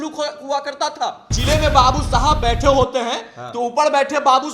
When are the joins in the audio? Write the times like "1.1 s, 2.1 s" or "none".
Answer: 1.3 s